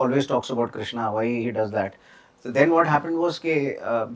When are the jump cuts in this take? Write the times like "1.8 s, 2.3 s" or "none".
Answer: none